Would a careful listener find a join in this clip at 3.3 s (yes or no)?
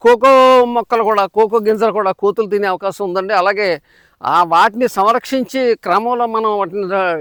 no